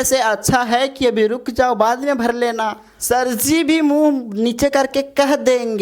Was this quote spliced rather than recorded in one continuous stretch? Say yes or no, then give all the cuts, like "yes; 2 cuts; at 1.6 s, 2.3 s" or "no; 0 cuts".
yes; 1 cut; at 2.9 s